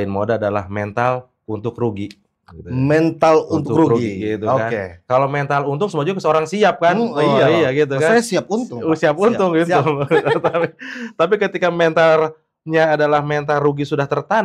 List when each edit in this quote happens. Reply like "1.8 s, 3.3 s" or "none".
none